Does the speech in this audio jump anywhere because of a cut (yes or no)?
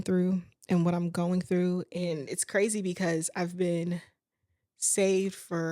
yes